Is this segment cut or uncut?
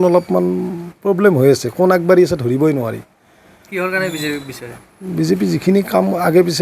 uncut